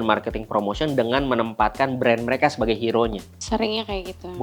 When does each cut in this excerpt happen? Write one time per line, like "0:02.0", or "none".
0:03.3